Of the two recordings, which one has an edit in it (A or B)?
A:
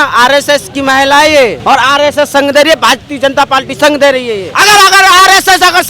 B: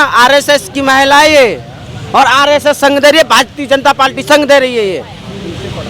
A